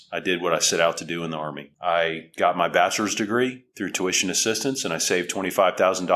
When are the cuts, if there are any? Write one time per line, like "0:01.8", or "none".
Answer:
none